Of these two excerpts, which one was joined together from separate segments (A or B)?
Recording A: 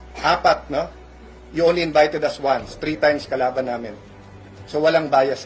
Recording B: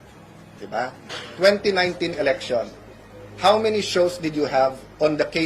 B